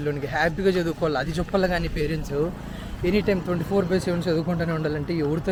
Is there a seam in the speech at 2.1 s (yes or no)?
no